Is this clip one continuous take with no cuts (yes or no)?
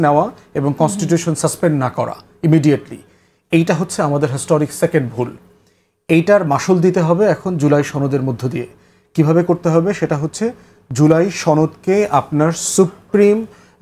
yes